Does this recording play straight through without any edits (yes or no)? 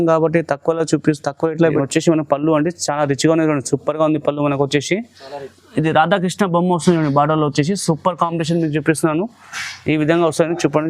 no